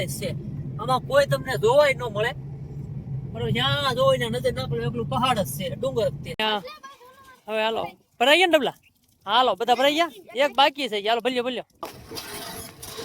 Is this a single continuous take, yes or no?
no